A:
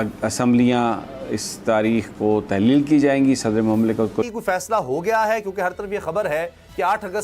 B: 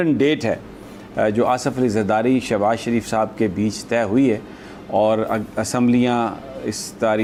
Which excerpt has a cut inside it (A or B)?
A